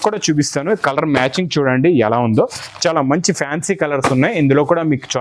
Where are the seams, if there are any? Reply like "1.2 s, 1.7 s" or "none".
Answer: none